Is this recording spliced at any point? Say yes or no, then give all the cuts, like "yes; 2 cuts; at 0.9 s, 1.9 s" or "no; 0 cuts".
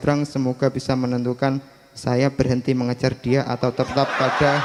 no; 0 cuts